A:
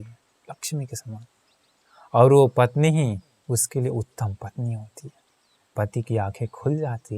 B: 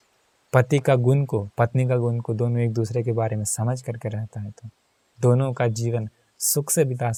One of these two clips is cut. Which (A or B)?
A